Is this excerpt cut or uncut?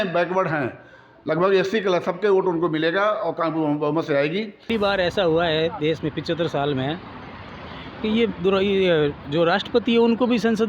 cut